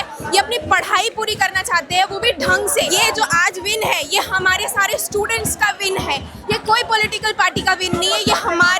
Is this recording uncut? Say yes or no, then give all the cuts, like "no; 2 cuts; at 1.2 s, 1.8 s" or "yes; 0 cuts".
no; 1 cut; at 3.0 s